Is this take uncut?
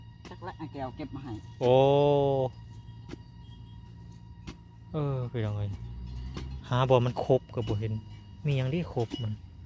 yes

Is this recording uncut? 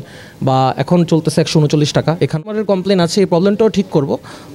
no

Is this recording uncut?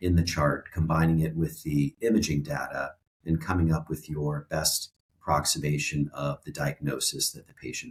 yes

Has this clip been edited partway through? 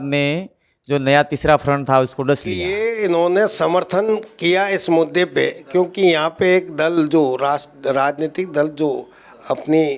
yes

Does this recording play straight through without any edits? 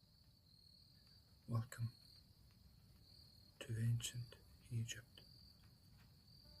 no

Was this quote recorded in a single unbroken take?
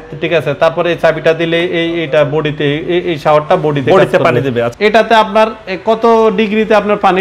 no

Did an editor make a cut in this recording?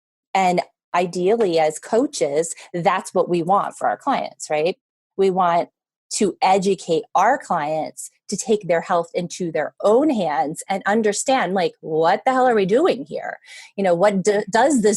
yes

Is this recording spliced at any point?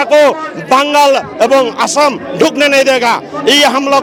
no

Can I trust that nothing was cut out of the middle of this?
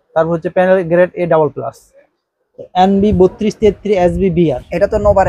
no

